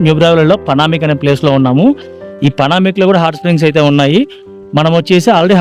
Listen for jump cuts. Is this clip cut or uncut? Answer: uncut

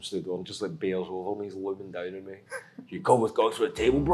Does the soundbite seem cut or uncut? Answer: uncut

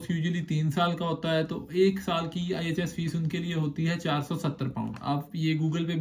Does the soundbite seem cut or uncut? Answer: uncut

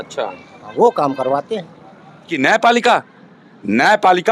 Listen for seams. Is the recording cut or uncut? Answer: cut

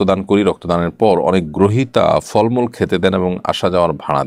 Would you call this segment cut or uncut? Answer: uncut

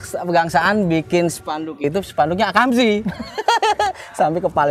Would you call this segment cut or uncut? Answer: uncut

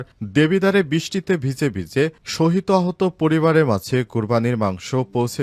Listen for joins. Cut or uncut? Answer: uncut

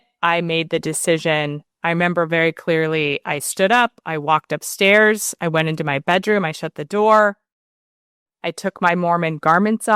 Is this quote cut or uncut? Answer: uncut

